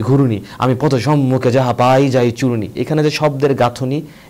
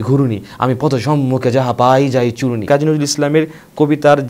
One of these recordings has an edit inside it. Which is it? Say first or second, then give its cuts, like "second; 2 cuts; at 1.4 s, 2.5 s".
second; 1 cut; at 2.6 s